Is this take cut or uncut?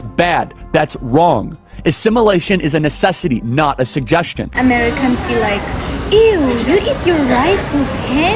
uncut